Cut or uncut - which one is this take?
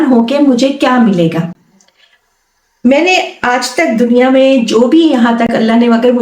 uncut